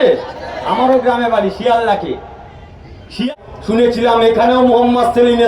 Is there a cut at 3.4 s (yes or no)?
yes